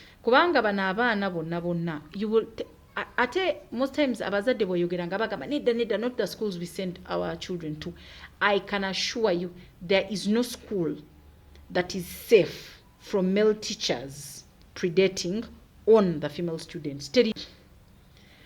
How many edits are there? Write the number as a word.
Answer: one